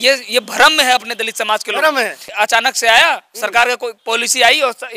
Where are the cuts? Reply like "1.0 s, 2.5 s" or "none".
2.4 s